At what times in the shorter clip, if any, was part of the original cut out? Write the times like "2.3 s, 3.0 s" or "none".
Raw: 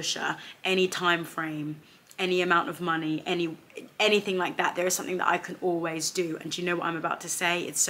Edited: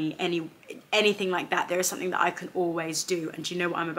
none